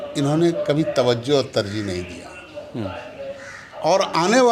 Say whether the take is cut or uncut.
uncut